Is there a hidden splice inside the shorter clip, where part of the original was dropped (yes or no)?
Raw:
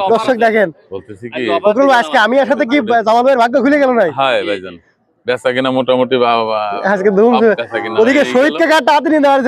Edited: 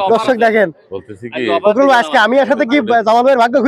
no